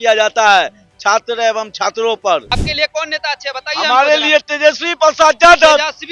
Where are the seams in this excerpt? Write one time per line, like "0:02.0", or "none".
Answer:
0:02.5